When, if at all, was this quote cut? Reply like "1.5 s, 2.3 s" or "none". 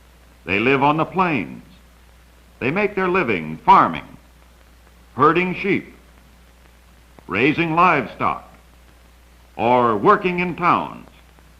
3.4 s

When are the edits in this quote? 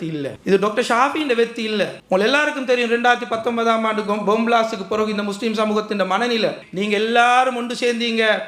6.6 s

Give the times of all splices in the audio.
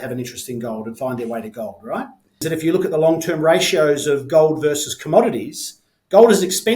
2.4 s

